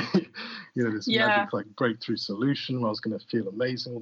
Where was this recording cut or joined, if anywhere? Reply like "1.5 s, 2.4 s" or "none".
none